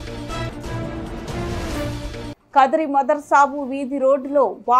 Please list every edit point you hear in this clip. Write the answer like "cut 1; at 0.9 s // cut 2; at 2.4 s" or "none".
cut 1; at 1.4 s // cut 2; at 2.4 s

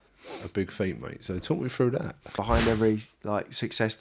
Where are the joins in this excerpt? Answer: cut 1; at 2.4 s

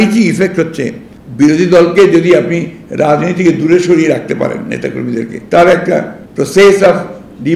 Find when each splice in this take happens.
cut 1; at 5.4 s // cut 2; at 6.2 s

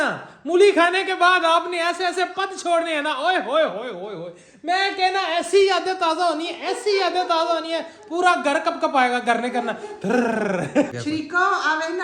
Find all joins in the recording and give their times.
cut 1; at 10.9 s

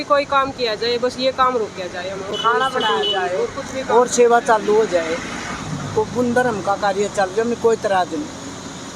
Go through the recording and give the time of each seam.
none

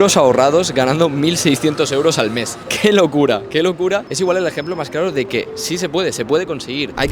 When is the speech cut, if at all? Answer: none

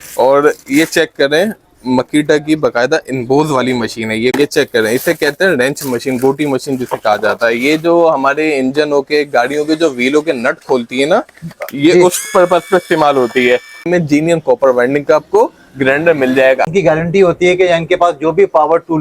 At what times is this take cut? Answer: cut 1; at 4.3 s // cut 2; at 13.9 s // cut 3; at 16.6 s

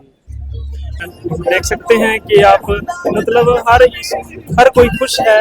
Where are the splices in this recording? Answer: cut 1; at 1.0 s

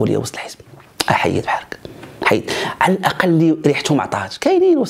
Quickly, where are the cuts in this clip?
none

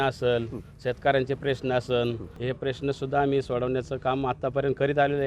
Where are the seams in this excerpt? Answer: cut 1; at 2.3 s

